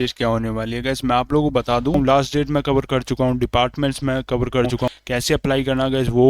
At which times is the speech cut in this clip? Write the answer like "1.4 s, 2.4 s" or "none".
1.9 s, 4.9 s